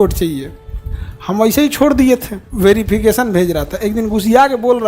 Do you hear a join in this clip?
yes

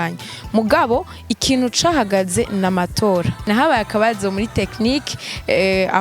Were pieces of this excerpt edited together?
yes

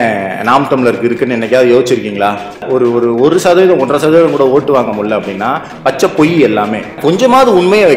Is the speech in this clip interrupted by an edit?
yes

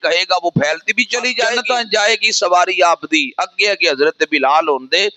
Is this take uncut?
no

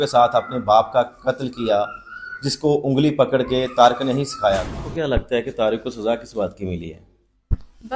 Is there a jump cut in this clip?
yes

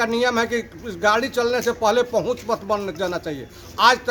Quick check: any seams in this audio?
no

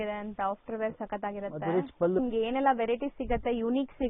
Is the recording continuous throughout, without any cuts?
no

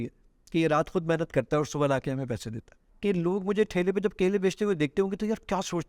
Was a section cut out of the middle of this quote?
yes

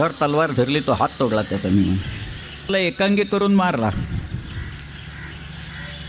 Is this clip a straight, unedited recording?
no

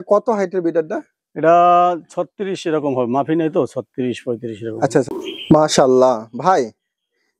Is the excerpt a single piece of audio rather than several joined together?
no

